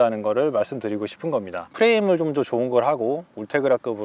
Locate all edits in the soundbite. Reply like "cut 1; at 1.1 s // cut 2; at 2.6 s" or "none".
cut 1; at 1.8 s